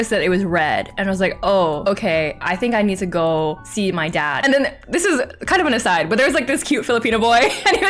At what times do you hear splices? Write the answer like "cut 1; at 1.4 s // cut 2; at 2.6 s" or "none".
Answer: cut 1; at 4.4 s

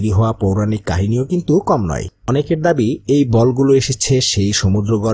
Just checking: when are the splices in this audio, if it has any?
cut 1; at 2.2 s

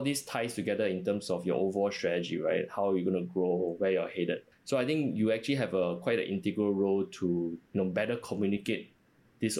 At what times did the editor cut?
cut 1; at 4.5 s

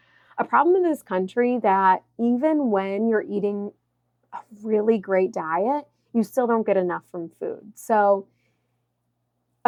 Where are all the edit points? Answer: none

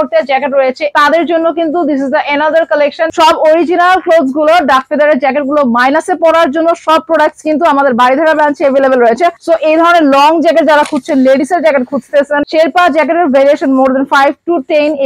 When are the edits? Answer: cut 1; at 0.9 s // cut 2; at 3.1 s // cut 3; at 9.4 s // cut 4; at 12.4 s

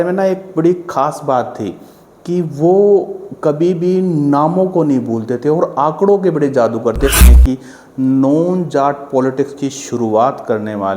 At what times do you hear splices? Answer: cut 1; at 7.3 s

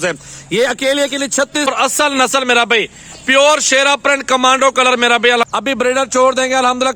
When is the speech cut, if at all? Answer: cut 1; at 1.7 s // cut 2; at 5.4 s

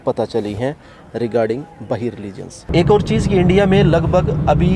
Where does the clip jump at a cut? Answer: cut 1; at 2.6 s

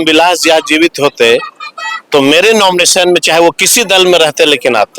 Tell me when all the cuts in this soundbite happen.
none

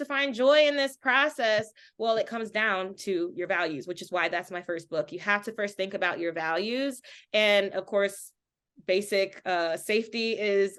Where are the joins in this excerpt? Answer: none

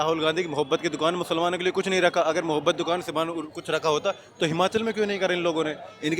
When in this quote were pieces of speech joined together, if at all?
none

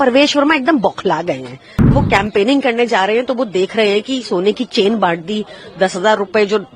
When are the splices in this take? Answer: cut 1; at 1.9 s

